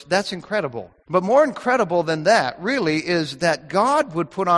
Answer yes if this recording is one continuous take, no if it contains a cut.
no